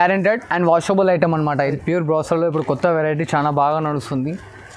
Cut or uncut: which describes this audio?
cut